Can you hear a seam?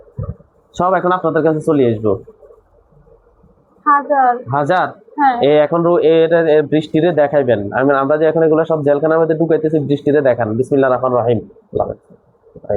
no; 0 cuts

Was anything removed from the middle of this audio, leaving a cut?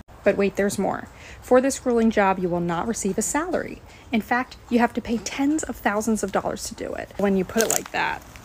yes; 1 cut; at 7.2 s

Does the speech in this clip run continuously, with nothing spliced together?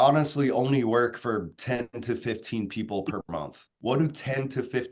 no; 1 cut; at 3.5 s

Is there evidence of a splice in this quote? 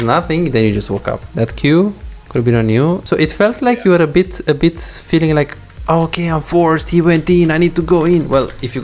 yes; 2 cuts; at 1.2 s, 3.0 s

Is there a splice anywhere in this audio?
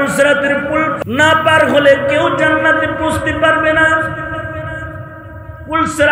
yes; 1 cut; at 0.9 s

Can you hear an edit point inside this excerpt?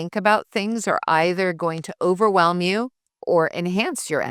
yes; 1 cut; at 3.1 s

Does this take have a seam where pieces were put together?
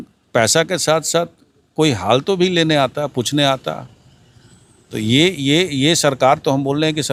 no; 0 cuts

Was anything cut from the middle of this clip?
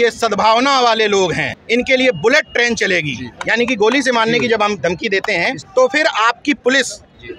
yes; 2 cuts; at 1.5 s, 5.6 s

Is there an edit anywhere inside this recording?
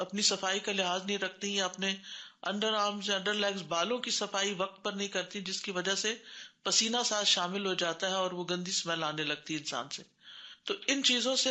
no; 0 cuts

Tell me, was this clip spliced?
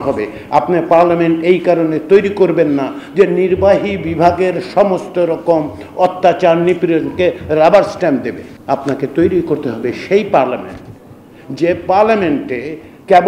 yes; 1 cut; at 8.5 s

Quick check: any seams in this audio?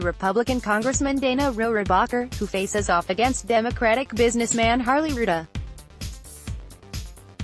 yes; 1 cut; at 5.5 s

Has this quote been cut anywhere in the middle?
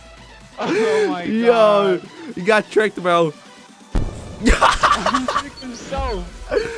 no; 0 cuts

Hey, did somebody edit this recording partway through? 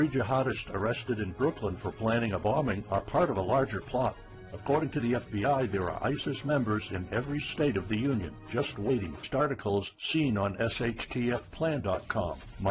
no; 0 cuts

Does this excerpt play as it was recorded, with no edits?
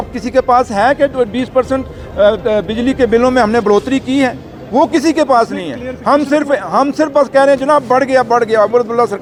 yes; 0 cuts

